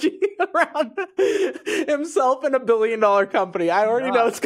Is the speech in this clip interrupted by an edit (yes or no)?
no